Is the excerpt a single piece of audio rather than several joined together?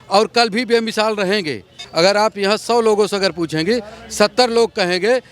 no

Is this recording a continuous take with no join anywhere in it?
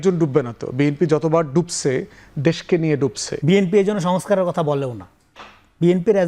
no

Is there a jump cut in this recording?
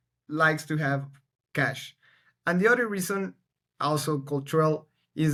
no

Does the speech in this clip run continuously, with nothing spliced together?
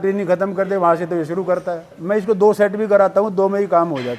no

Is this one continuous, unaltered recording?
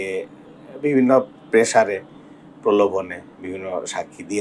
yes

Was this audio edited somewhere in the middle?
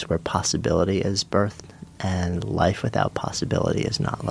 no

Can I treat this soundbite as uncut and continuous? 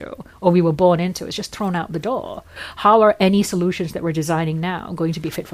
no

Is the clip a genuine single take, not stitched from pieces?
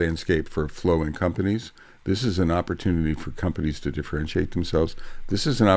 yes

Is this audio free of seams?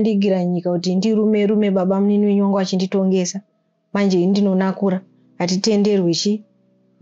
yes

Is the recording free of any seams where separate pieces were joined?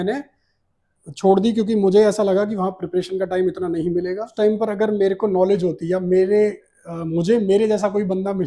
no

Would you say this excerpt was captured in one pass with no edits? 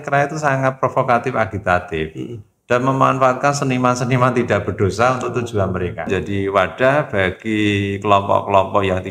no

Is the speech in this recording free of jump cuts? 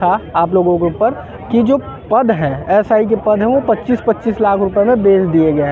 yes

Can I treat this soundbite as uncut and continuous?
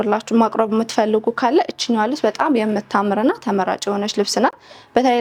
yes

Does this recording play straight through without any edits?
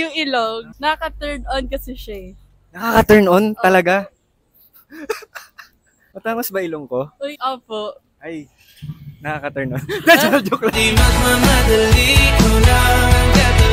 yes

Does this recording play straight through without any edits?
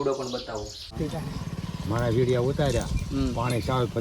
no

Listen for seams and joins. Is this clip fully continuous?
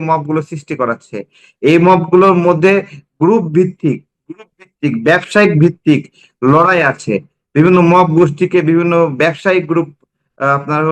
yes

